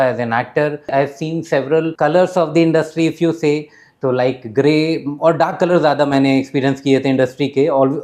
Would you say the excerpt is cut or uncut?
cut